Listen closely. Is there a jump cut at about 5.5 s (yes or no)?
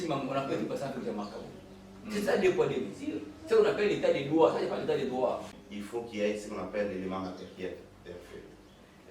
yes